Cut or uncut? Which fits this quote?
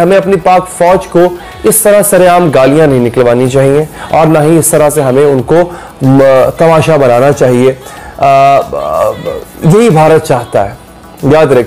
uncut